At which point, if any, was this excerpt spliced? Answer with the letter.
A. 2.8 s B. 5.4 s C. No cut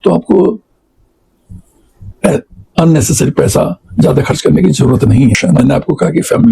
B